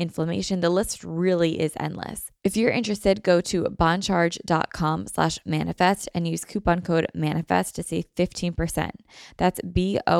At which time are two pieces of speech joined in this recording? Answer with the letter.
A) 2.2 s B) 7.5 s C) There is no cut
A